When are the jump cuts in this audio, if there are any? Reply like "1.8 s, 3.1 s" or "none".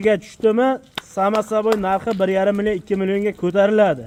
none